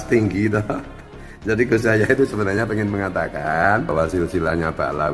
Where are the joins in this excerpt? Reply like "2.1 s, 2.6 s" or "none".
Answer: 3.9 s